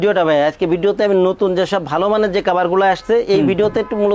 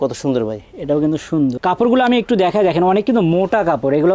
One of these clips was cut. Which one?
second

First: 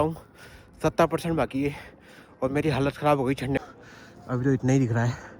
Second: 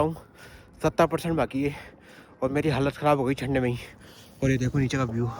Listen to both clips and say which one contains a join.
first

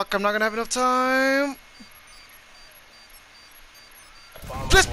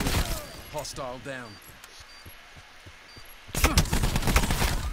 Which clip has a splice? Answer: second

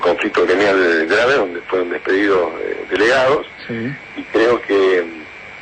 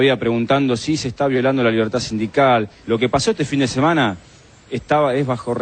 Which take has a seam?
second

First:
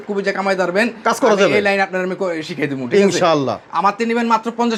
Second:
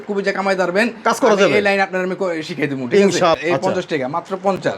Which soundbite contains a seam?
second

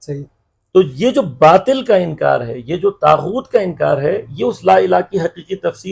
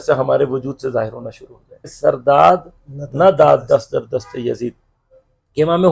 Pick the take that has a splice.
second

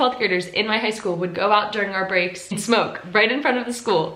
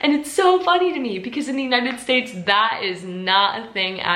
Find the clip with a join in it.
first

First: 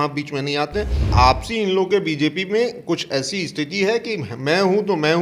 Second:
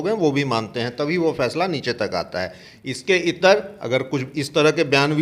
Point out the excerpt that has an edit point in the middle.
first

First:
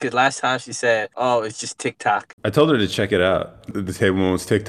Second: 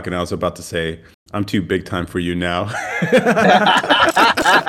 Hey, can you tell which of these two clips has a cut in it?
first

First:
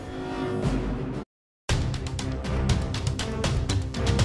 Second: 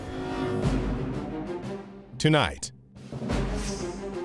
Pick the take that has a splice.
second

